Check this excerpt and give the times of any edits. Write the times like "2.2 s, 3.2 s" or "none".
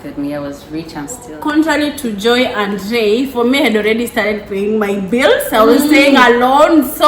1.3 s